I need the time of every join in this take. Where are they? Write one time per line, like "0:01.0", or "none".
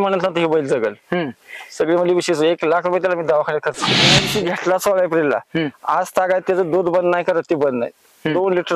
0:04.2